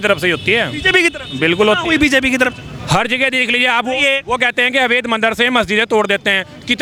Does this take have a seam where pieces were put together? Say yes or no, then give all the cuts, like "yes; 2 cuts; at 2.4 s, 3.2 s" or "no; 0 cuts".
no; 0 cuts